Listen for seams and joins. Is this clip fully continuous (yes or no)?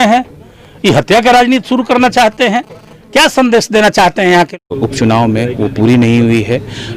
no